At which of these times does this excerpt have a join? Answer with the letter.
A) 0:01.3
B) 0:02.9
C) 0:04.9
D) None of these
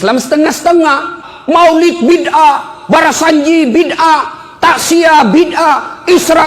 A